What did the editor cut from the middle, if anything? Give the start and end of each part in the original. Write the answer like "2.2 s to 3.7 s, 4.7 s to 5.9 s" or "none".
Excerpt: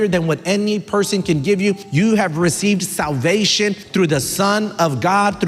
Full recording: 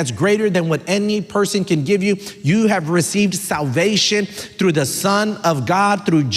2.3 s to 2.4 s, 4.3 s to 4.5 s